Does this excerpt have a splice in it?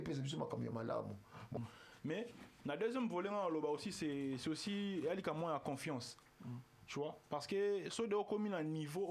yes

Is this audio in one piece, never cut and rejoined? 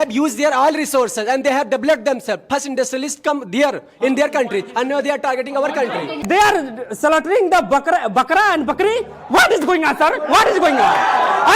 no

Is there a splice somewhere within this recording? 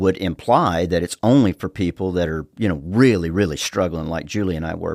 no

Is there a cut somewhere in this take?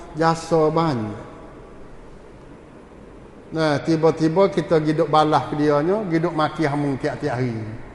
no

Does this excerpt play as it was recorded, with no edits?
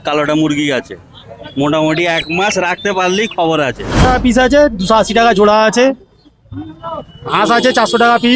no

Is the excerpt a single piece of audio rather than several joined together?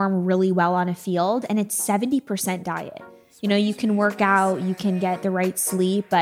yes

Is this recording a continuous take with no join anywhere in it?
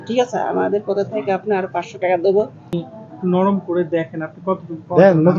no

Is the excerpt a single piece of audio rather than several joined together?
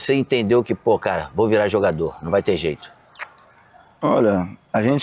yes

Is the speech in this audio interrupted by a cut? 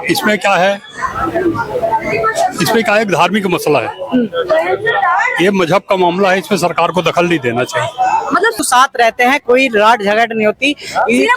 yes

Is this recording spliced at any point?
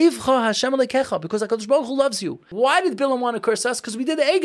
yes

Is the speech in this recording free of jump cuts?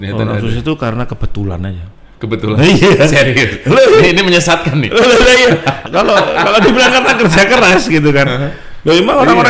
no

